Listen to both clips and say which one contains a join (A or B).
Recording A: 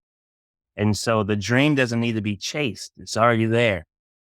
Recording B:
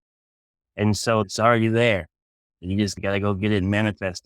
B